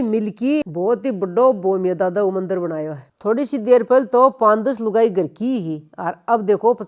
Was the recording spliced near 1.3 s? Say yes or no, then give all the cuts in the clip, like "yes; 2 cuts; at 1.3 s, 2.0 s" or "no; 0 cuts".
no; 1 cut; at 3.0 s